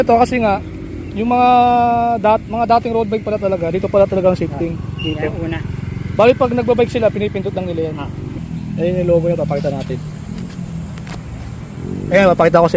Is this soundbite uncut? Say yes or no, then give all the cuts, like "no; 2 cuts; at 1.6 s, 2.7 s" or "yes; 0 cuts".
no; 2 cuts; at 8.3 s, 10.0 s